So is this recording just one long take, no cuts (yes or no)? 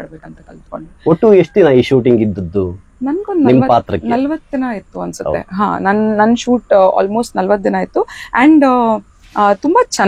yes